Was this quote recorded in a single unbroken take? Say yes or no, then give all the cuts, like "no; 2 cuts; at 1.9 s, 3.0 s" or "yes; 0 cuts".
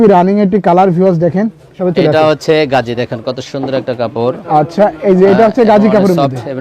no; 1 cut; at 1.8 s